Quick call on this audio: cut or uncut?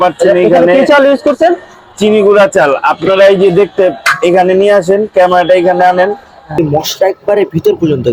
cut